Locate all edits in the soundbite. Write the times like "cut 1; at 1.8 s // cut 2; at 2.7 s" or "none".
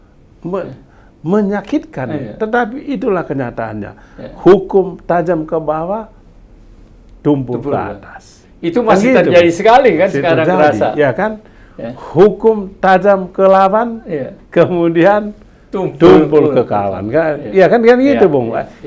none